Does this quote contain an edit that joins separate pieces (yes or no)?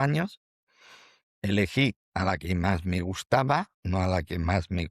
no